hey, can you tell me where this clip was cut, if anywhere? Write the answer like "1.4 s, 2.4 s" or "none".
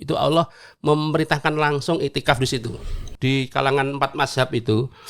3.1 s